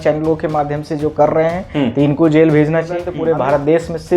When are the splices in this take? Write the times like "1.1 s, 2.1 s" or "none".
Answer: 3.1 s